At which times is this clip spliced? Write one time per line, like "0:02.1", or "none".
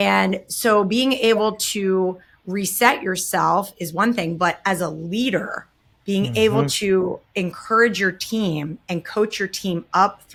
none